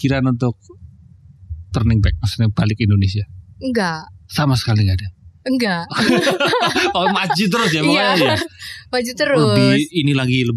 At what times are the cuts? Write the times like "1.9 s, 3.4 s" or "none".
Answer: none

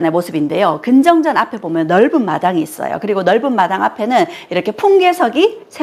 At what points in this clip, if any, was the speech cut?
none

